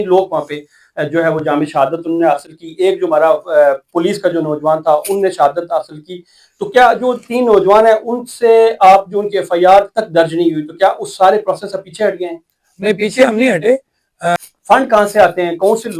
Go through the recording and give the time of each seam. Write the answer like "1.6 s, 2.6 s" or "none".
14.4 s